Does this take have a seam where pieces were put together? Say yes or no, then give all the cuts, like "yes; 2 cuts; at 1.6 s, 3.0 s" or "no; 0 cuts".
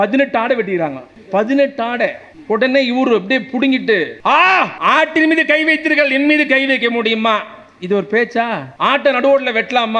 yes; 5 cuts; at 1.1 s, 2.3 s, 4.1 s, 4.7 s, 8.7 s